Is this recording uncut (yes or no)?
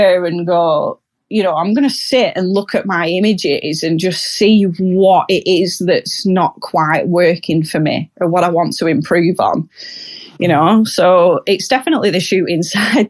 yes